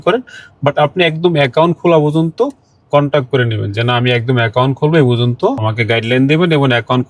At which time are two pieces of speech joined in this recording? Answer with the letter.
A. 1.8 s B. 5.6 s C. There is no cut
B